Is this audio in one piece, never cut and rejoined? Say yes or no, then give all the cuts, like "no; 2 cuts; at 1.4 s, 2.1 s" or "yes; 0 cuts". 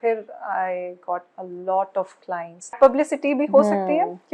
no; 1 cut; at 2.8 s